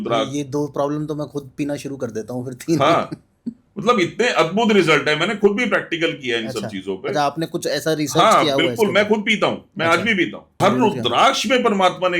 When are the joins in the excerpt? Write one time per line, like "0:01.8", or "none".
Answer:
0:10.5